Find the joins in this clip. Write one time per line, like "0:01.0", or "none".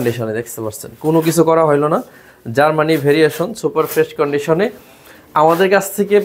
none

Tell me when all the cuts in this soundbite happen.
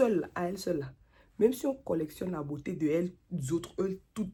none

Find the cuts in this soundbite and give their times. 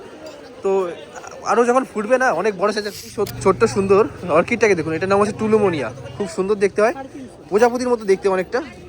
0:03.1

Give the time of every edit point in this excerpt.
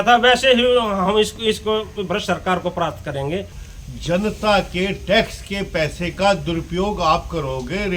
0:03.6

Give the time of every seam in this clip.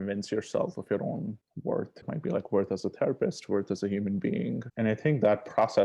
0:02.0
0:04.7

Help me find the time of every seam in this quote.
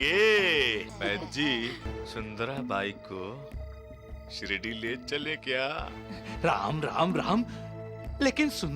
0:00.9
0:02.0

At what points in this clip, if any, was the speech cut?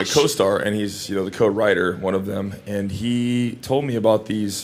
0:03.2

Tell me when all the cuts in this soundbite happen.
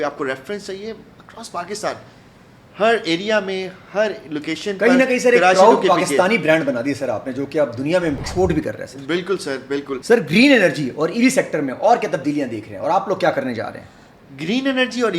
0:08.2
0:10.0

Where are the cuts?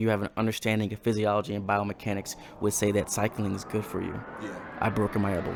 none

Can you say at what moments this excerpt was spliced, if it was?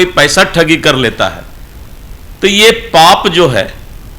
none

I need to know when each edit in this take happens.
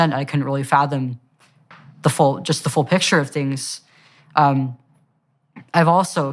none

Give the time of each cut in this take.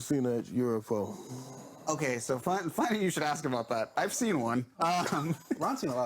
none

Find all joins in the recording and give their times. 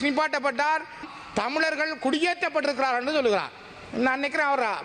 0:01.0

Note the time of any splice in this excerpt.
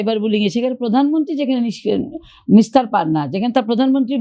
none

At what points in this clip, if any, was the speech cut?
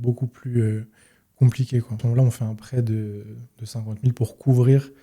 0:02.0

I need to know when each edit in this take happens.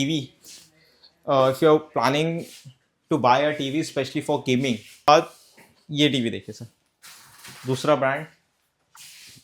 0:05.1

